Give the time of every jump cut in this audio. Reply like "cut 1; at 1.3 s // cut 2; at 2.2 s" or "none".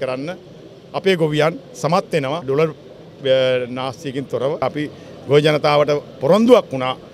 cut 1; at 2.4 s // cut 2; at 4.6 s